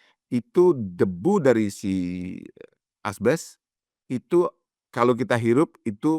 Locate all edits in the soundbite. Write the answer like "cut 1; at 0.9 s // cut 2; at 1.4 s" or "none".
none